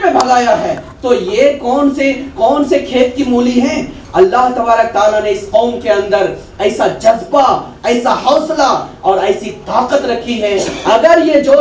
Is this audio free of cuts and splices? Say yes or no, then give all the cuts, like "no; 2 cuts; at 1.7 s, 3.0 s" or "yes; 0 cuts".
yes; 0 cuts